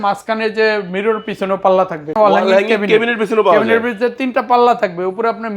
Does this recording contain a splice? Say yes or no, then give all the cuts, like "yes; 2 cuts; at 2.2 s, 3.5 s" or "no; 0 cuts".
yes; 1 cut; at 2.1 s